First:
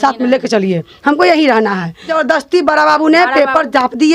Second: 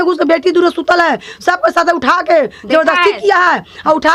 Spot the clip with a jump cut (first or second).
first